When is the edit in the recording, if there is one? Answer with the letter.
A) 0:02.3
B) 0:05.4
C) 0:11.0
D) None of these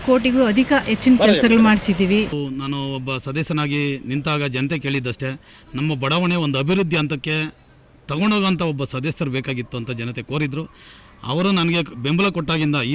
A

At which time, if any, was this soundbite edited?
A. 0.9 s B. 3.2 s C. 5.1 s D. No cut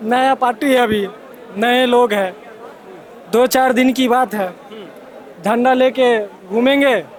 D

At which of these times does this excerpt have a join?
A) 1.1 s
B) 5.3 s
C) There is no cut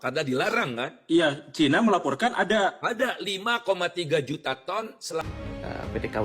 B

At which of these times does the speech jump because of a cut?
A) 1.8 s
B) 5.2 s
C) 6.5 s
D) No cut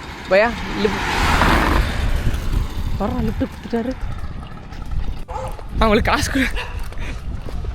B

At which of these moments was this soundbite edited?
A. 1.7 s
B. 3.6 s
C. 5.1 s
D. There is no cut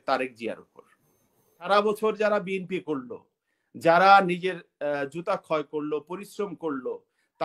A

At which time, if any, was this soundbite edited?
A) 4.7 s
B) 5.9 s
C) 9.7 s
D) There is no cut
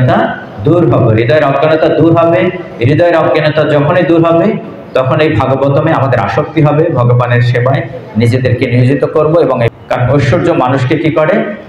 C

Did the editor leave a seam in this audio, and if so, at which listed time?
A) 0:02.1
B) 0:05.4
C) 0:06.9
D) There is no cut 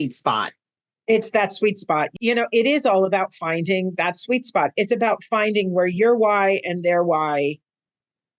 A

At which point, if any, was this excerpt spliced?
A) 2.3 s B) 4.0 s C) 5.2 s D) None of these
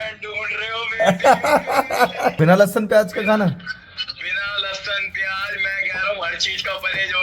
A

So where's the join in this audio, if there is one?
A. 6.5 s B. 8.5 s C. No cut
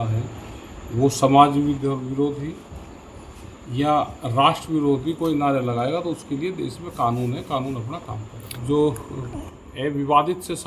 B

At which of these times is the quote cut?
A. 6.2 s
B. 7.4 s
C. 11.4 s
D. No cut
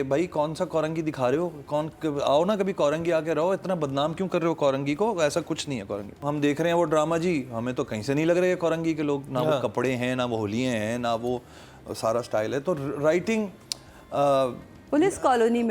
A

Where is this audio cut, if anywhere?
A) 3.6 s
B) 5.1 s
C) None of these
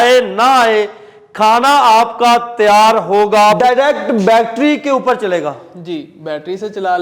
A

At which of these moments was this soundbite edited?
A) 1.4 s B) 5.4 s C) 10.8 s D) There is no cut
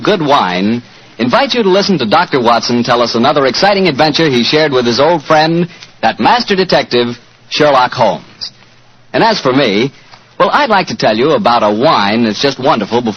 B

